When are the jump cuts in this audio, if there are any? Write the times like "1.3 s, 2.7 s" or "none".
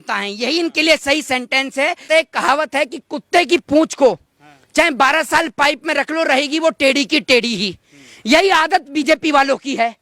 2.1 s

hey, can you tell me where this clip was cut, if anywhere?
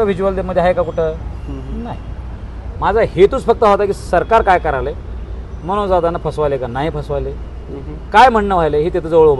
none

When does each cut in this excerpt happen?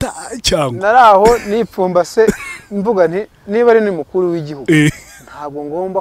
none

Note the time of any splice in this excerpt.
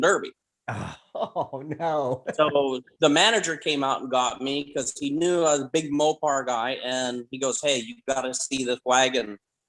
none

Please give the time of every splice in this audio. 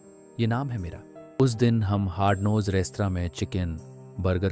1.4 s

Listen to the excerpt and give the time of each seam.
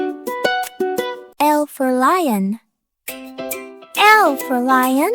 1.3 s

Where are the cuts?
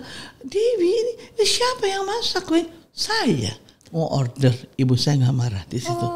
none

